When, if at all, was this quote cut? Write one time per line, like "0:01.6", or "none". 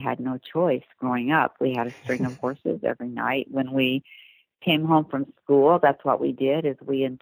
none

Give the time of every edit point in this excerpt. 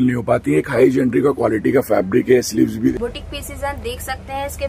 0:02.9

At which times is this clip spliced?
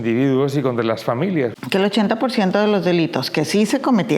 0:01.5

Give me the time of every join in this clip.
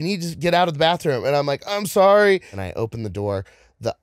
0:02.6

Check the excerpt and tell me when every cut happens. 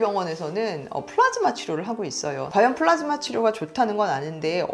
0:02.4

